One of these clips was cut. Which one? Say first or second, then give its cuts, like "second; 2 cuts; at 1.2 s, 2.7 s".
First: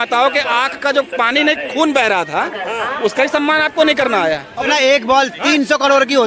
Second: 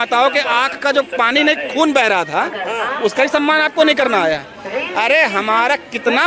first; 1 cut; at 4.6 s